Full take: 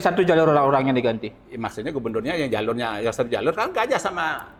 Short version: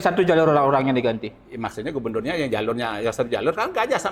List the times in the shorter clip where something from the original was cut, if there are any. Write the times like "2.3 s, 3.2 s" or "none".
none